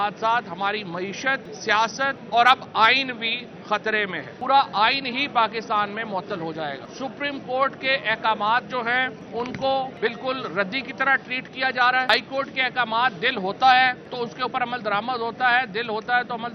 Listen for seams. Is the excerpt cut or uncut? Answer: cut